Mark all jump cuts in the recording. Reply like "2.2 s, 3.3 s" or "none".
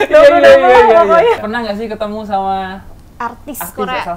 1.4 s

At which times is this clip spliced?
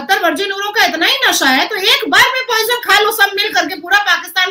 none

